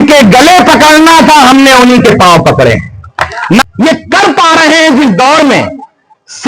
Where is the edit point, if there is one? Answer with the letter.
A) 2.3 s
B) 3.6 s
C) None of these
B